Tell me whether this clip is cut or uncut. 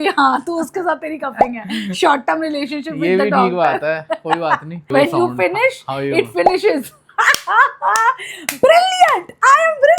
cut